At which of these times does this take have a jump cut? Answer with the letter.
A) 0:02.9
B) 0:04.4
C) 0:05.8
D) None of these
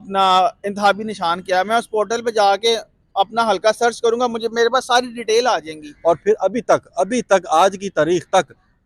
C